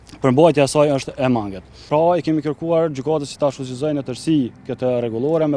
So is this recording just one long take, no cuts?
no; 1 cut; at 1.8 s

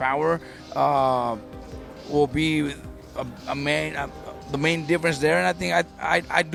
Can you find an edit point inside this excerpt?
no; 0 cuts

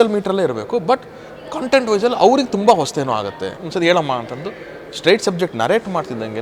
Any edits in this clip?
yes; 1 cut; at 3.6 s

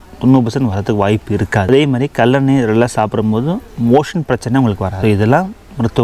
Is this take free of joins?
yes; 0 cuts

